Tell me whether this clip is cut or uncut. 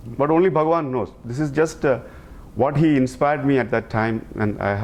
uncut